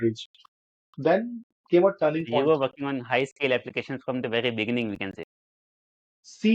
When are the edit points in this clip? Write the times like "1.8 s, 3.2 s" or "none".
none